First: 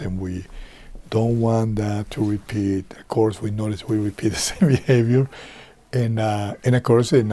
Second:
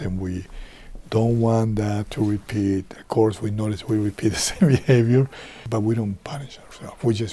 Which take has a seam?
second; 1 cut; at 5.7 s

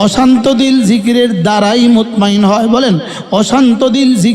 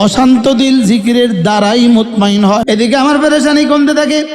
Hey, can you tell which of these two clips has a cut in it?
second; 1 cut; at 2.6 s

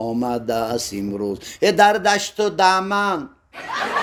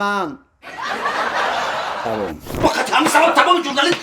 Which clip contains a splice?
second; 1 cut; at 2.5 s

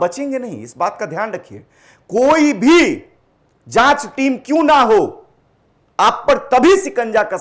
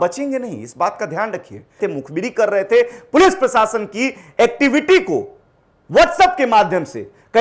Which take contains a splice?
second; 1 cut; at 1.8 s

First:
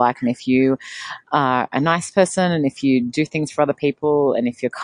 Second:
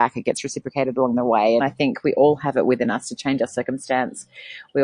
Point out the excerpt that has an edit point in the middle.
second; 1 cut; at 1.6 s

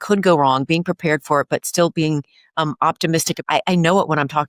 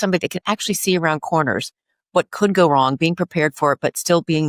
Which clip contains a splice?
first; 1 cut; at 3.3 s

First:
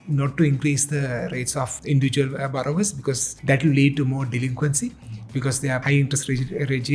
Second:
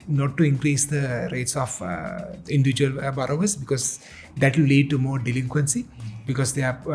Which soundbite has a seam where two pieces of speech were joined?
first; 3 cuts; at 1.8 s, 3.3 s, 5.8 s

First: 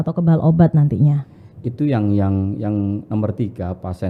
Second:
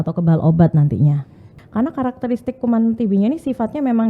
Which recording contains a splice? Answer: second; 1 cut; at 1.5 s

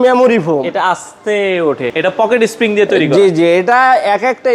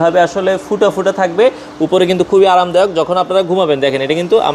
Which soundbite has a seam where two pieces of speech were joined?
first; 1 cut; at 1.9 s

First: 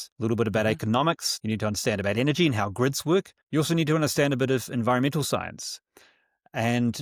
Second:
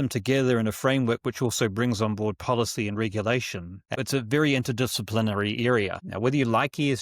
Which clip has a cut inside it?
second; 2 cuts; at 4.0 s, 6.0 s

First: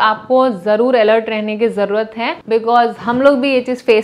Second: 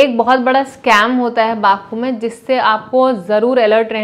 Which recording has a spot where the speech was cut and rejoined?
first; 1 cut; at 2.4 s

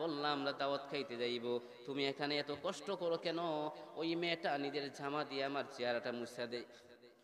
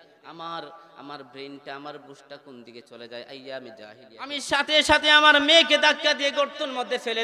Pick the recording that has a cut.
second; 1 cut; at 4.4 s

